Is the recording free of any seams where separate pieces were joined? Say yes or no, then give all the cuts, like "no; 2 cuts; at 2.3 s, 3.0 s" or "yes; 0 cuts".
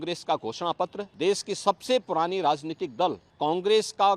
no; 2 cuts; at 1.0 s, 3.3 s